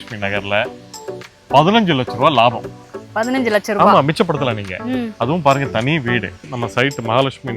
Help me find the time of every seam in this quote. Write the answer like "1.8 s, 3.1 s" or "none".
1.2 s, 6.5 s